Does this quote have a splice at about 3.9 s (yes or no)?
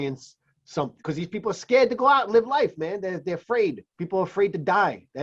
yes